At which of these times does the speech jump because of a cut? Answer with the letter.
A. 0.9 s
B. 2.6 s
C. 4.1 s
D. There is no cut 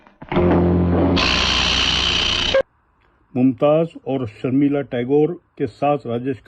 B